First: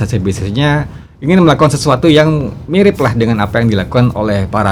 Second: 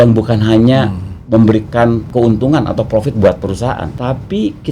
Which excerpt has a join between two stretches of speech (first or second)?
second